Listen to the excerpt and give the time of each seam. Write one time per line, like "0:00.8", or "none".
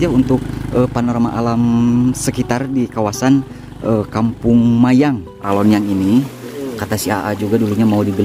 0:05.4